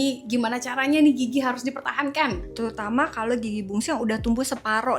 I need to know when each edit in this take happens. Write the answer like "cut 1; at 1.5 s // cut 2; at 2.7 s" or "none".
cut 1; at 2.4 s

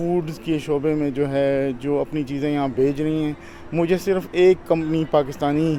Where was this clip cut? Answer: none

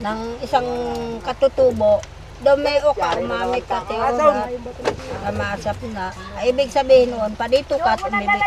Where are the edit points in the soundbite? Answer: none

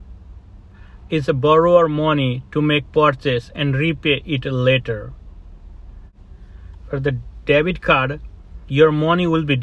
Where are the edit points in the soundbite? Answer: cut 1; at 6.1 s

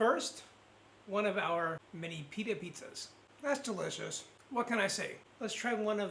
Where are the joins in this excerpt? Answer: cut 1; at 1.9 s // cut 2; at 3.2 s // cut 3; at 5.2 s

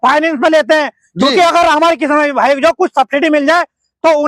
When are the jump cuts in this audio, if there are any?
none

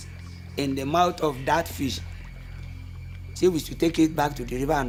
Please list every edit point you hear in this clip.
none

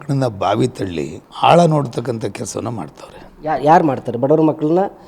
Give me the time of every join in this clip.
cut 1; at 1.2 s

